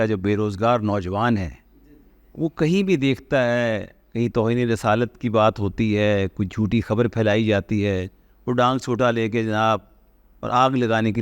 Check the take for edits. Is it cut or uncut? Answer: uncut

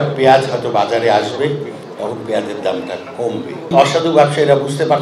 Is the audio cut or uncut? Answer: cut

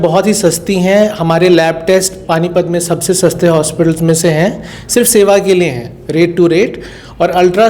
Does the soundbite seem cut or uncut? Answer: uncut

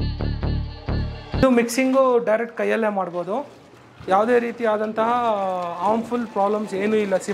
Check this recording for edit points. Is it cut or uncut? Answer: cut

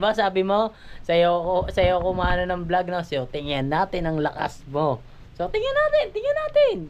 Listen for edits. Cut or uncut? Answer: uncut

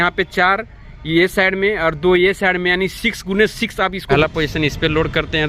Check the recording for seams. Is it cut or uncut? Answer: cut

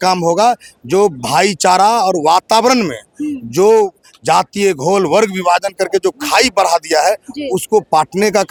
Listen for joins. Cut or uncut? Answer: uncut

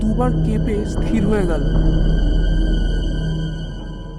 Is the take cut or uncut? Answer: uncut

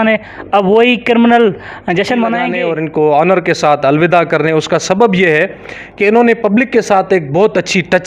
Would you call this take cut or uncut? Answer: cut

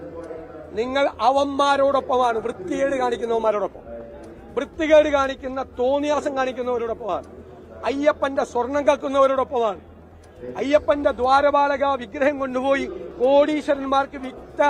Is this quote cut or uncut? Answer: uncut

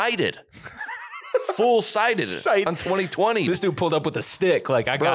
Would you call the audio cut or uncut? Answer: cut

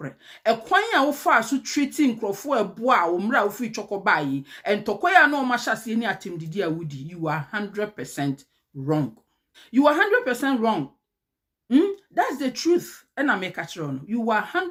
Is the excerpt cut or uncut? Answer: uncut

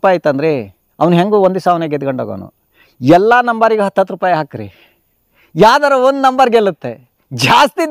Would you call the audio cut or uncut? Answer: uncut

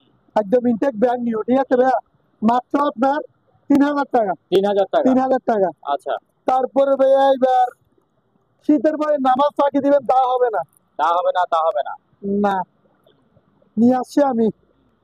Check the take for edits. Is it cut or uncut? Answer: uncut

